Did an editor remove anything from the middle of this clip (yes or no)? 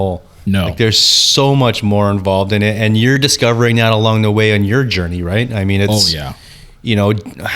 yes